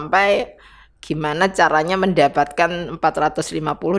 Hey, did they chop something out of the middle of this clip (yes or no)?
no